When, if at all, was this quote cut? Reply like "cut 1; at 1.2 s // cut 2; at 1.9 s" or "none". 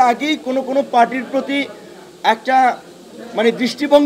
none